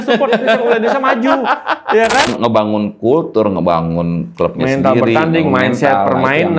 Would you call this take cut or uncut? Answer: cut